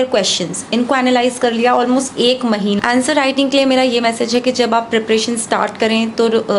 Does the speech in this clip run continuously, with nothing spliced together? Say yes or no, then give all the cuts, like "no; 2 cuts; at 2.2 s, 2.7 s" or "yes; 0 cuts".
no; 1 cut; at 2.8 s